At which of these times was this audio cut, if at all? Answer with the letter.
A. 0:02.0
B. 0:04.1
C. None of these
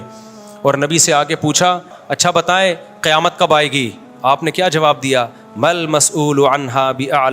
A